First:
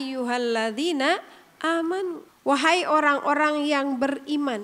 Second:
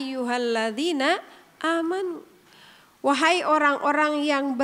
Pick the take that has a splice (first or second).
first